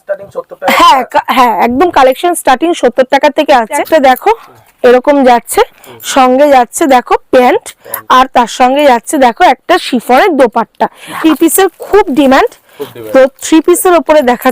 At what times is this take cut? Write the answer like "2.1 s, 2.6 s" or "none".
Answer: 3.8 s, 11.2 s